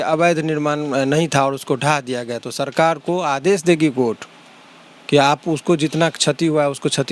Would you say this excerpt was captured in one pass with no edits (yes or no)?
yes